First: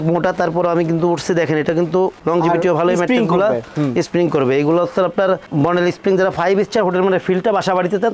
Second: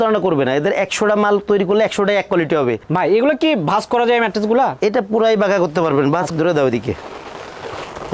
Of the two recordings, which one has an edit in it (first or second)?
second